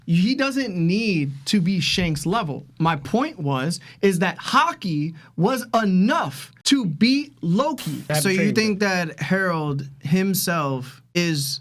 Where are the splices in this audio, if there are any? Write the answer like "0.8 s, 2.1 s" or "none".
8.1 s